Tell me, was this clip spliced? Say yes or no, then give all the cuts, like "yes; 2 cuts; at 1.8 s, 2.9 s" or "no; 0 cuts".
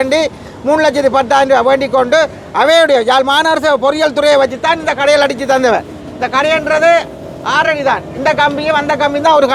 no; 0 cuts